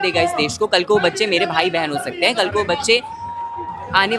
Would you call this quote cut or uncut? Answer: uncut